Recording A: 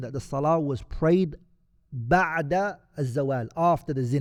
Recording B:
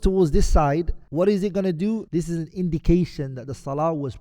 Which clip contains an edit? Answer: B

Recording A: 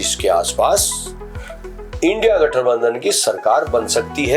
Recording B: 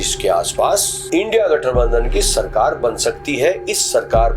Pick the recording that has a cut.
B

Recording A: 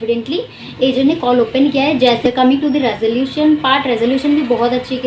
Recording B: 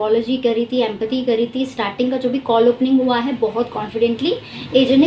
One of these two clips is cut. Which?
A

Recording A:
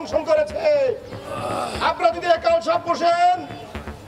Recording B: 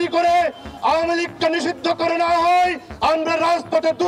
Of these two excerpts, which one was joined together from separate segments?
B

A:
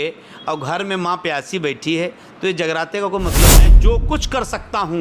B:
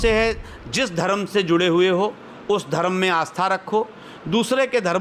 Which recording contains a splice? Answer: A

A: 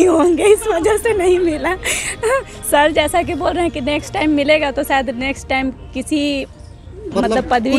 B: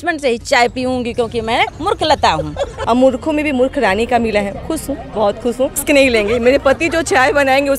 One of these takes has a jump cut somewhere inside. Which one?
B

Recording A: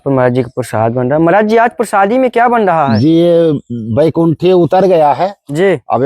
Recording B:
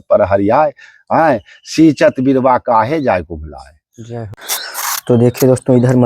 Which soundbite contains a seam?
B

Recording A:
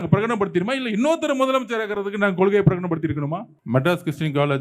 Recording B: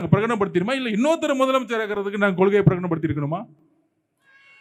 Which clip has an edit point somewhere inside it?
A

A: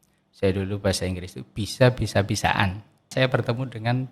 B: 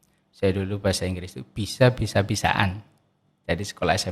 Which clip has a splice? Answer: A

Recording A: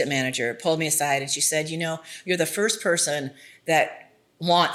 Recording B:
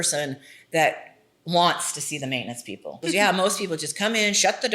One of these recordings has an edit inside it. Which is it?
B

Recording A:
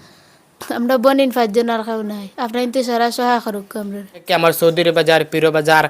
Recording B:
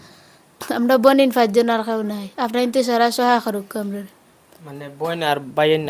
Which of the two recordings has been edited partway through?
A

